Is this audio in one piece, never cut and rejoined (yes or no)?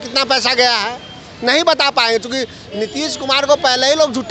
yes